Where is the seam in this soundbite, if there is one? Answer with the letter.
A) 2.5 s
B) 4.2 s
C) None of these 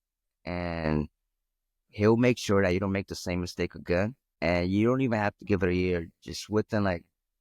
B